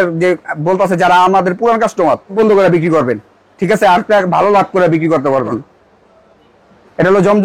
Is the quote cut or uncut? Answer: cut